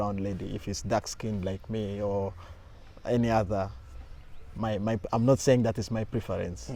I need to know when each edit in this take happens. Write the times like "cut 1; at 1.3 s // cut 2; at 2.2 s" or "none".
none